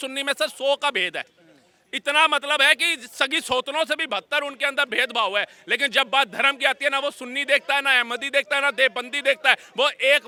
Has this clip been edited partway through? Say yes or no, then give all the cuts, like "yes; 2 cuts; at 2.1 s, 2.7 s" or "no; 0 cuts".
no; 0 cuts